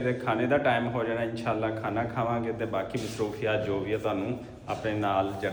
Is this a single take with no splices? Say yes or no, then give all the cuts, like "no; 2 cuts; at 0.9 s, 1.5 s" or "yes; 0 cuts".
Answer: yes; 0 cuts